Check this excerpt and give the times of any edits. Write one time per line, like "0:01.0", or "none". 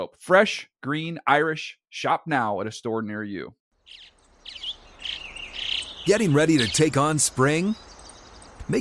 0:03.6